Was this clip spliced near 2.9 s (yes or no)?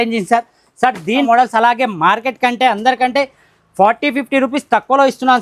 no